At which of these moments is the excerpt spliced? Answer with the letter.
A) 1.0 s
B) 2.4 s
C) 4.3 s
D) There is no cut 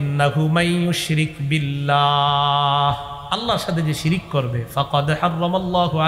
D